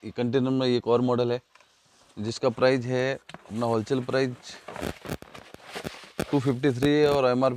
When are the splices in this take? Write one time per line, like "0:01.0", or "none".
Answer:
none